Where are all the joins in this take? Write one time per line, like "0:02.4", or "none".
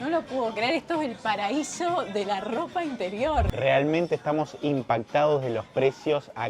0:03.5

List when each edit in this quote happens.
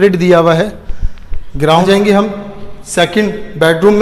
0:01.8

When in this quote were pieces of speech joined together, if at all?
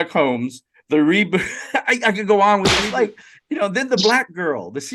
0:02.8

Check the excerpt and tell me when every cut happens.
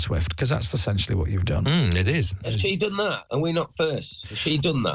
0:02.5

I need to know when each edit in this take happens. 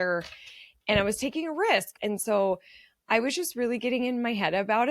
0:01.9

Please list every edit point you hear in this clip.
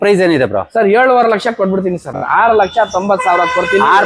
0:02.2

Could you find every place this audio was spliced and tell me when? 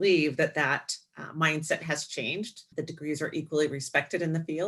0:02.6

